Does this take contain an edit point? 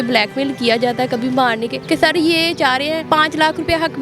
yes; 2 cuts; at 1.7 s, 3.0 s

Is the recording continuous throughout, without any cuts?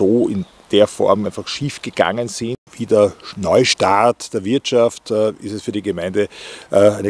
no; 1 cut; at 2.6 s

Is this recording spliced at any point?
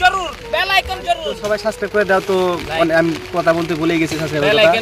yes; 1 cut; at 1.4 s

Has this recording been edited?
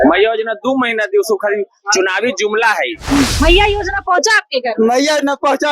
yes; 1 cut; at 3.3 s

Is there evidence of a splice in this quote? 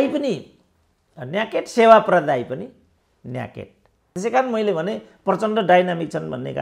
yes; 1 cut; at 4.1 s

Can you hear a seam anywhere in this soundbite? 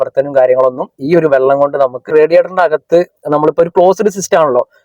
yes; 1 cut; at 2.1 s

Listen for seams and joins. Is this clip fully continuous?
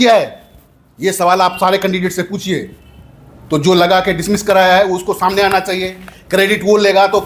yes; 0 cuts

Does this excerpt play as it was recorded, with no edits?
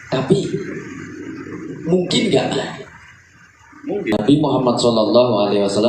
no; 1 cut; at 4.2 s

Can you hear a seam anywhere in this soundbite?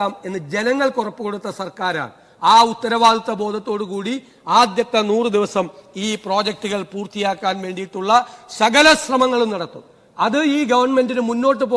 no; 0 cuts

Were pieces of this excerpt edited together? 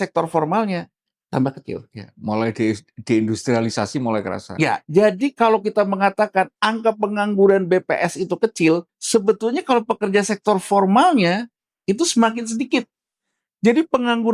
yes; 1 cut; at 8.9 s

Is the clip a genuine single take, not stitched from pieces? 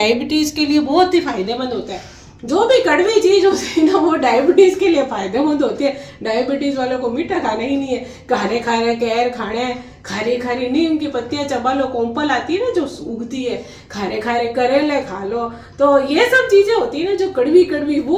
yes; 0 cuts

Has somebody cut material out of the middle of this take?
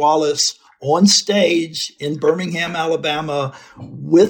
no; 0 cuts

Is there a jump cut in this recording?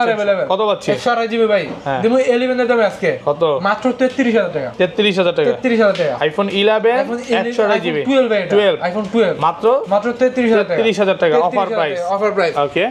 no; 0 cuts

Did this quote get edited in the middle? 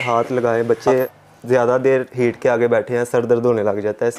yes; 1 cut; at 1.0 s

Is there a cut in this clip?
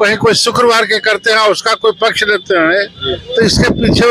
no; 0 cuts

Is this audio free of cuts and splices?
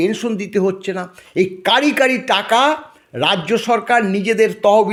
yes; 0 cuts

